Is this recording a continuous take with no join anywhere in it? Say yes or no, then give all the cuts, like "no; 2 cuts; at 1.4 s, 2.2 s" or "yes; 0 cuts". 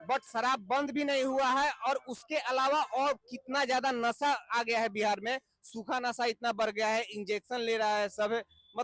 yes; 0 cuts